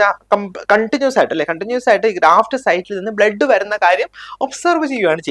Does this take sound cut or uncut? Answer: uncut